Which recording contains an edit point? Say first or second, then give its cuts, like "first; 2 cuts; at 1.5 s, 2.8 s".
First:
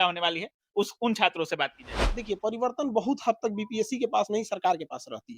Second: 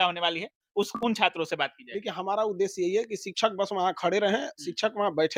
first; 1 cut; at 1.9 s